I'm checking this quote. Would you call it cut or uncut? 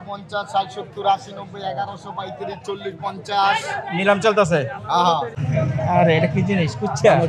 cut